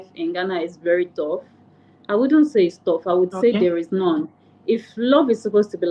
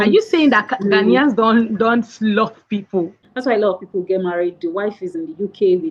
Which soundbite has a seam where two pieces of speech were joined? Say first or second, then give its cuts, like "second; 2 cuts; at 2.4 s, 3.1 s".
second; 1 cut; at 3.2 s